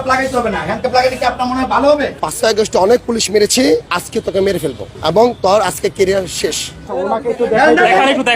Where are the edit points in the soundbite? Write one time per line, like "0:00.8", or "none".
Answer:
0:02.2
0:04.0
0:04.9
0:06.9